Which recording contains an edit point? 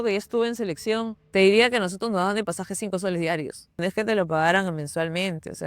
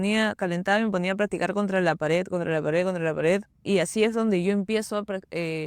first; 2 cuts; at 1.2 s, 3.8 s

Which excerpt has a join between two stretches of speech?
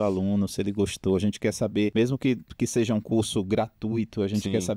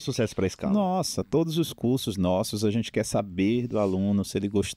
first; 1 cut; at 1.9 s

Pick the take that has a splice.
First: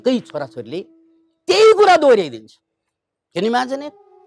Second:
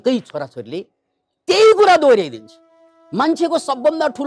second; 1 cut; at 3.0 s

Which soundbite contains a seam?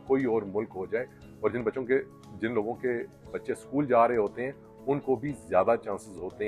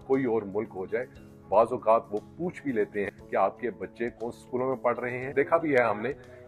second; 3 cuts; at 1.2 s, 3.1 s, 5.3 s

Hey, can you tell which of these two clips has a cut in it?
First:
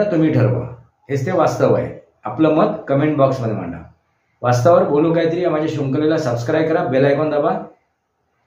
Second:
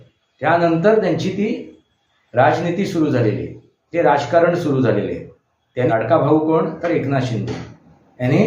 second; 1 cut; at 5.9 s

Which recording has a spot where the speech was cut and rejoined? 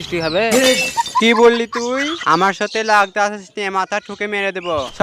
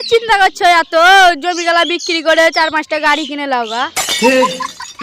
first; 1 cut; at 2.2 s

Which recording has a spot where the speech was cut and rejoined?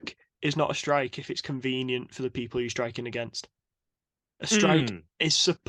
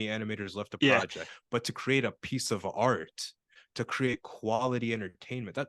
second; 1 cut; at 1.3 s

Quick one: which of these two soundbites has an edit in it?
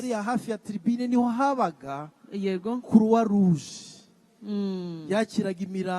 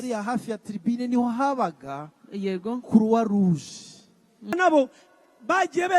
second; 1 cut; at 4.5 s

